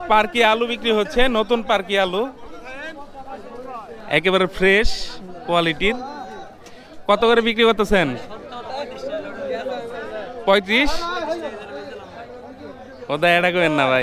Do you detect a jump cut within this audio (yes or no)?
no